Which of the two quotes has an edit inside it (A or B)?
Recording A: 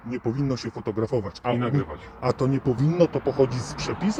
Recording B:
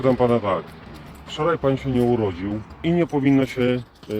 B